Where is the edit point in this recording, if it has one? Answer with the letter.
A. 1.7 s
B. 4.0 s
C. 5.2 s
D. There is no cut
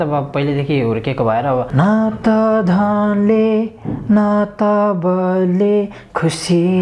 A